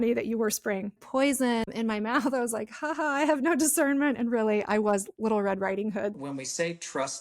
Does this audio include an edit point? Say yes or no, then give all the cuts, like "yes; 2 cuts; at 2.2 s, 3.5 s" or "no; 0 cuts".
yes; 3 cuts; at 1.0 s, 1.7 s, 6.1 s